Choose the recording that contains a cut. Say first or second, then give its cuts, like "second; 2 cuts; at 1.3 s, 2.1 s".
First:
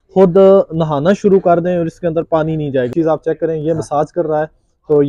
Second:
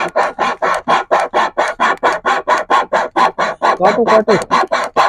first; 1 cut; at 2.9 s